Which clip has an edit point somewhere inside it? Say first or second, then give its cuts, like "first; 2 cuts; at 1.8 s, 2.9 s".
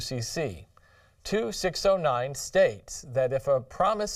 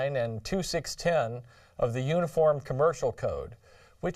second; 1 cut; at 1.1 s